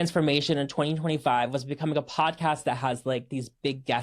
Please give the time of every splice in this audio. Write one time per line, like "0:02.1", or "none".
none